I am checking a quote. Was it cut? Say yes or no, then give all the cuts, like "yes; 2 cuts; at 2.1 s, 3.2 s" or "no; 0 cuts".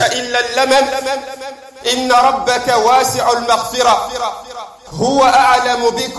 no; 0 cuts